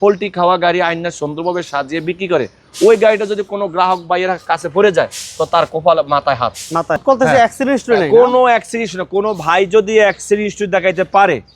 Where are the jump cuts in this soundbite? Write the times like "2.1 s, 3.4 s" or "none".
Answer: 7.0 s